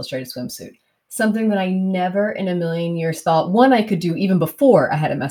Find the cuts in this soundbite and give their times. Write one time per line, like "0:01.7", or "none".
none